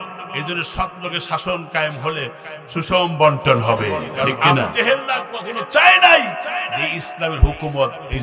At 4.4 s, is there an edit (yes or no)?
yes